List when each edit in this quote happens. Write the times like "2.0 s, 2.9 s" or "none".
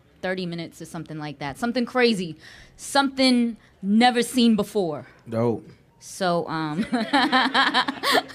none